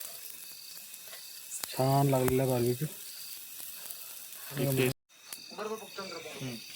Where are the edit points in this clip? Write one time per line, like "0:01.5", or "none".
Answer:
0:04.9

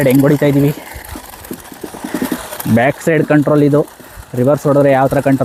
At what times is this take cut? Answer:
none

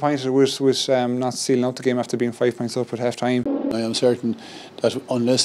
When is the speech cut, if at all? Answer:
0:03.7

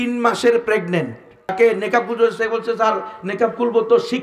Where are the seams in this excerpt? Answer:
0:01.5

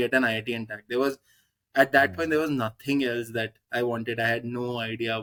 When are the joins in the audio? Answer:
none

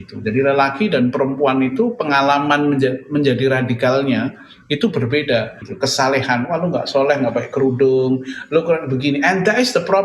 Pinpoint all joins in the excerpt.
0:05.7

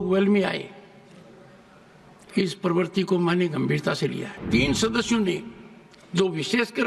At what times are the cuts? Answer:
0:04.4

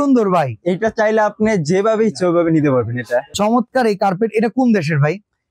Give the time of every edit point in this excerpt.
0:03.3

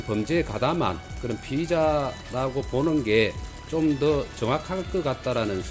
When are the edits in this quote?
none

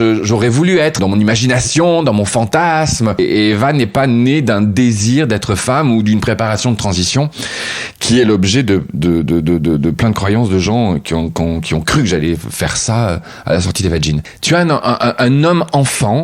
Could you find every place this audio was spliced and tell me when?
0:01.0
0:03.2
0:14.3

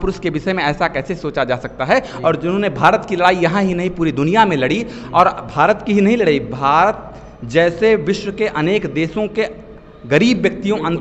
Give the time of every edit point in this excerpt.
none

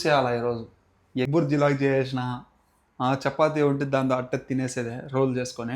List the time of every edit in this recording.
0:01.3

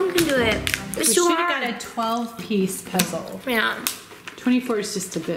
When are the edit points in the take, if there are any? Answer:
none

